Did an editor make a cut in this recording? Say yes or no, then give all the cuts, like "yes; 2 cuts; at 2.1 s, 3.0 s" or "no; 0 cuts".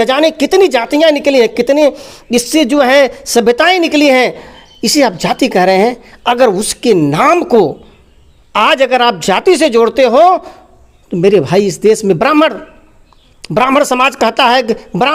no; 0 cuts